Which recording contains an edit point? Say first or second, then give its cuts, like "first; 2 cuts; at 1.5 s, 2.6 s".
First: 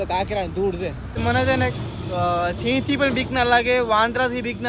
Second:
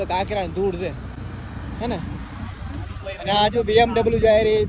first; 1 cut; at 1.2 s